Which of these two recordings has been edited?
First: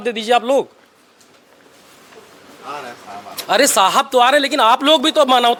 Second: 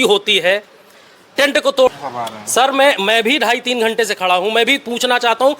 second; 1 cut; at 1.9 s

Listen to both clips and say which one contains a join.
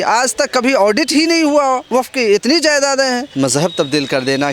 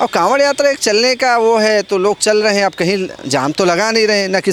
first; 2 cuts; at 1.8 s, 3.3 s

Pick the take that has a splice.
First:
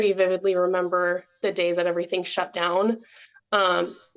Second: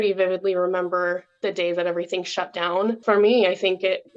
second; 1 cut; at 3.0 s

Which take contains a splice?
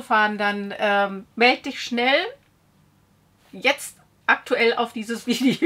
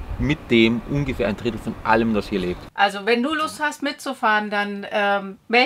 second; 1 cut; at 2.6 s

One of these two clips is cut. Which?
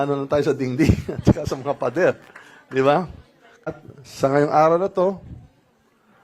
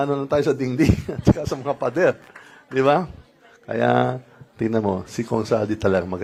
first; 1 cut; at 3.7 s

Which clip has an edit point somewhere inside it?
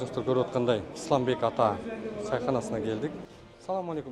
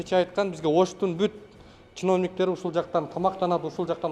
first; 2 cuts; at 0.9 s, 3.2 s

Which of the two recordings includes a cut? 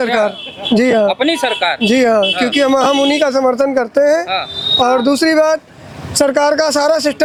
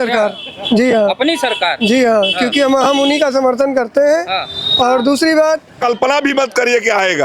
second; 1 cut; at 5.8 s

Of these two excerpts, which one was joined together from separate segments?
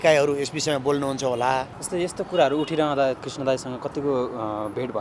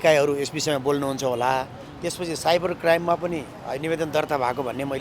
first; 2 cuts; at 1.8 s, 3.2 s

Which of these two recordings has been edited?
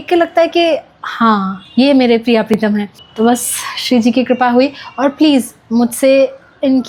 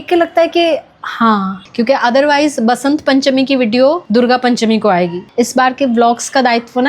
second; 2 cuts; at 1.6 s, 5.3 s

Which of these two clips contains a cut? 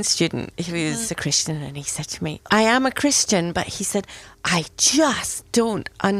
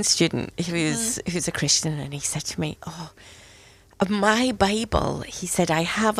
first; 2 cuts; at 1.1 s, 2.5 s

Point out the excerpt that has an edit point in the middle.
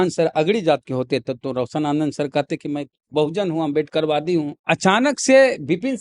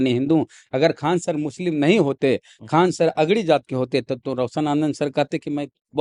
first; 1 cut; at 4.6 s

